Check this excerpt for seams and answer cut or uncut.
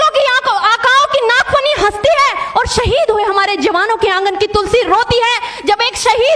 uncut